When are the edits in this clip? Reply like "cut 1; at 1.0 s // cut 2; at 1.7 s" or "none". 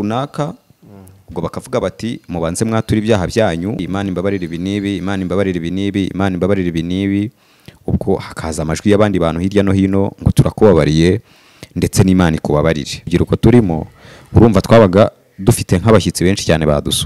cut 1; at 3.8 s // cut 2; at 13.1 s